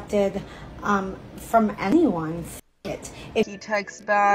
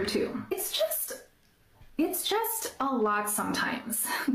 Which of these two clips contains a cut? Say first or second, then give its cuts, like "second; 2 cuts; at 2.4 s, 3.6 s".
first; 1 cut; at 3.5 s